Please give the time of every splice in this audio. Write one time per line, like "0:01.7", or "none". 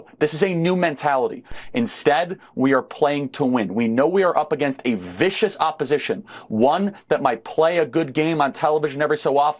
0:01.5